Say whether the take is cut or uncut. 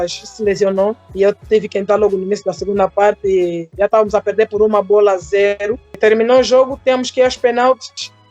cut